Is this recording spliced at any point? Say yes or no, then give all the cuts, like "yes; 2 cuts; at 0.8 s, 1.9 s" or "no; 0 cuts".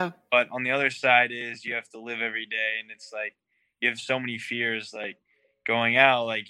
no; 0 cuts